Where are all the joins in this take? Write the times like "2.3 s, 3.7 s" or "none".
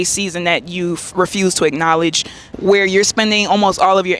2.5 s